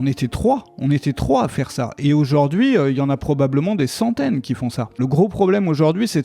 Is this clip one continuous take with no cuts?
no; 1 cut; at 5.0 s

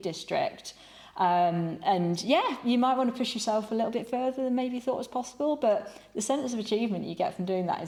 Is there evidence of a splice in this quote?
no; 0 cuts

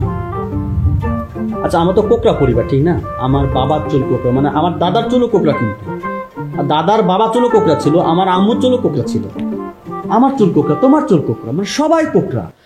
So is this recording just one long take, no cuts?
yes; 0 cuts

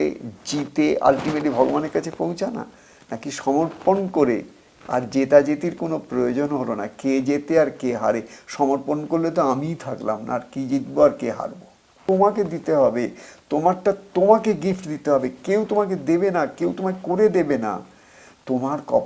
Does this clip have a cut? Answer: yes; 1 cut; at 12.0 s

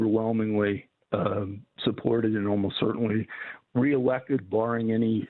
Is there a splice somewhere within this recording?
no; 0 cuts

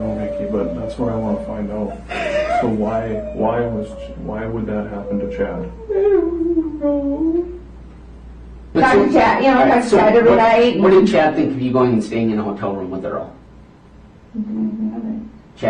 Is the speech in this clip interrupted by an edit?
yes; 1 cut; at 8.7 s

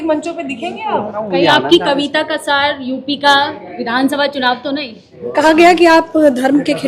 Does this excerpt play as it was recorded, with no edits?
no; 2 cuts; at 1.2 s, 5.1 s

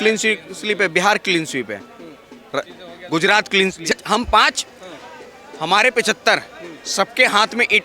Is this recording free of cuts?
no; 1 cut; at 3.9 s

